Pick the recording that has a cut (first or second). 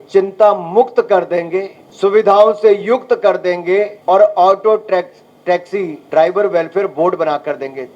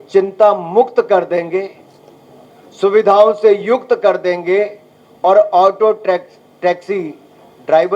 first